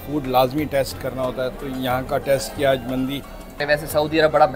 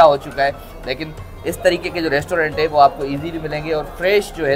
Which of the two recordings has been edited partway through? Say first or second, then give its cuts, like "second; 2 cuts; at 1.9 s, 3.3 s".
first; 1 cut; at 3.6 s